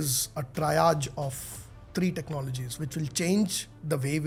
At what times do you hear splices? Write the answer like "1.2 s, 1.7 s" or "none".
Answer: none